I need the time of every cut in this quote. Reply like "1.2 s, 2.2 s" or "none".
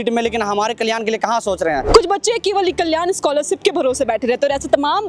1.8 s